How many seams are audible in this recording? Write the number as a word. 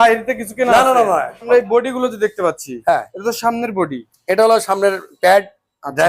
one